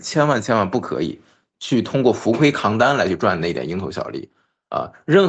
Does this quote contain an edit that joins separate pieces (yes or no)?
no